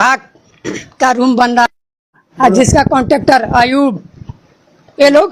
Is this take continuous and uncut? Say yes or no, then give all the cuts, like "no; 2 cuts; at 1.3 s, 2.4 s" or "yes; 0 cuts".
no; 1 cut; at 2.2 s